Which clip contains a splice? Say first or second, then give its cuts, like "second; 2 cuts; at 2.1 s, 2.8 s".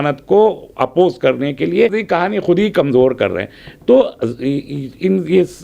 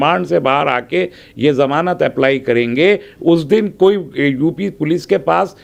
first; 1 cut; at 1.9 s